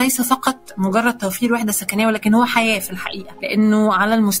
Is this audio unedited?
yes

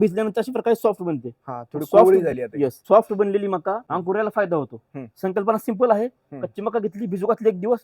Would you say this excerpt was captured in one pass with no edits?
no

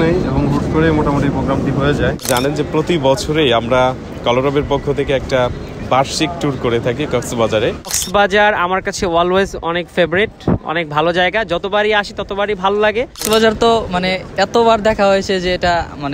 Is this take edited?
yes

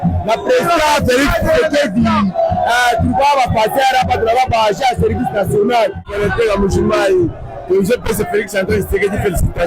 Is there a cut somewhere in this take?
yes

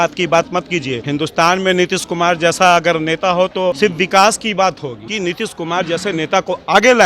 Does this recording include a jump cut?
yes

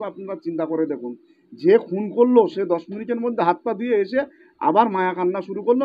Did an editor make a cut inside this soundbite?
no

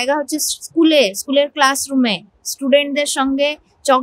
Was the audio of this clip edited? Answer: no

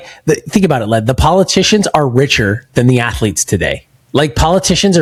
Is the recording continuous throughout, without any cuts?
yes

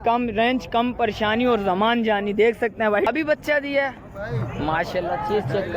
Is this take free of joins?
no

